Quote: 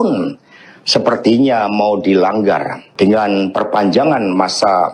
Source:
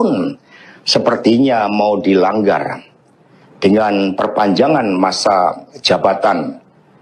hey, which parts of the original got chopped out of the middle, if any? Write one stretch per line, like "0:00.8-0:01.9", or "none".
0:02.8-0:03.4